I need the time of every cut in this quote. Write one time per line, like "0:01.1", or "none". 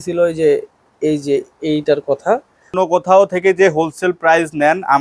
0:02.7